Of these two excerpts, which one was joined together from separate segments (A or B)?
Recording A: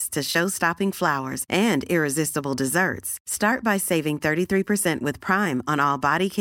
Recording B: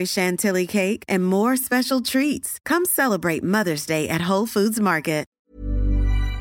B